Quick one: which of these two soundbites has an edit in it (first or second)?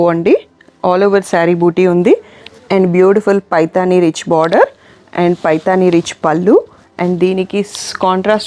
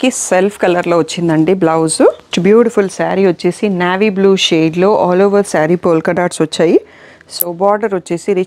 second